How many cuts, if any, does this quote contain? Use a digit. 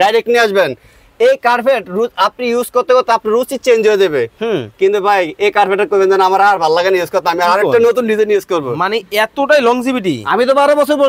0